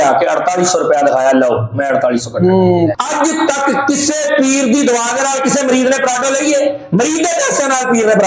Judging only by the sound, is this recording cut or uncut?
cut